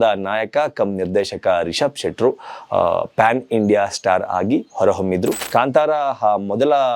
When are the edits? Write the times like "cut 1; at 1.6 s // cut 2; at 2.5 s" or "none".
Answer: cut 1; at 5.4 s

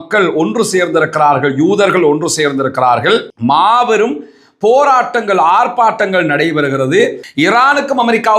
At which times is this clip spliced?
cut 1; at 7.2 s

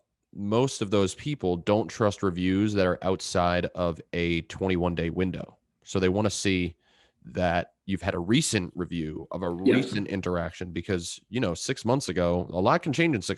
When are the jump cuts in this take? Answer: none

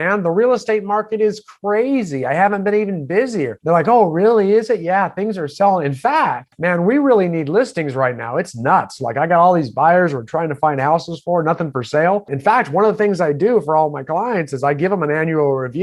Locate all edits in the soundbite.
cut 1; at 3.6 s // cut 2; at 6.5 s // cut 3; at 12.3 s

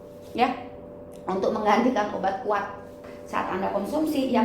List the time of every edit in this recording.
cut 1; at 3.1 s

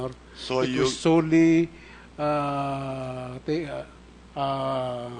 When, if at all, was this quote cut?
cut 1; at 3.6 s

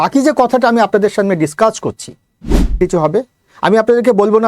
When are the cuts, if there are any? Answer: cut 1; at 2.8 s

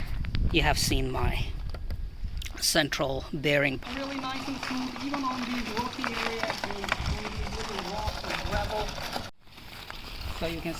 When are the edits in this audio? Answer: cut 1; at 3.8 s // cut 2; at 9.3 s

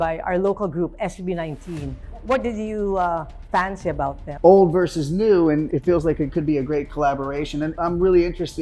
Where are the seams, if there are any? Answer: cut 1; at 4.2 s // cut 2; at 5.7 s // cut 3; at 7.7 s

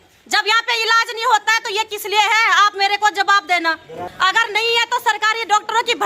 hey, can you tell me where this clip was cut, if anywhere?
cut 1; at 4.0 s

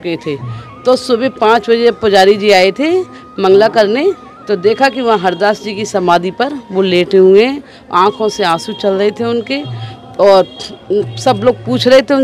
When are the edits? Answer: none

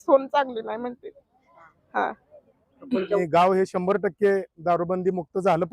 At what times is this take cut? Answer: cut 1; at 3.2 s

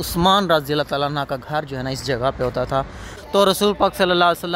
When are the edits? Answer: cut 1; at 3.0 s

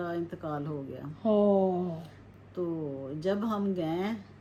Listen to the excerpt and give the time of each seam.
none

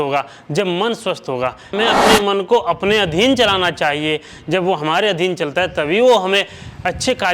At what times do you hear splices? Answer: cut 1; at 1.7 s

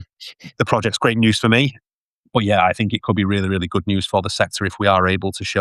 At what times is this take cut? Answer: cut 1; at 1.8 s

